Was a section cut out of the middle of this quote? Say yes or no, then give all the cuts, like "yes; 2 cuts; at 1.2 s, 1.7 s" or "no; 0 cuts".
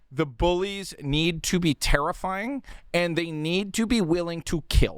no; 0 cuts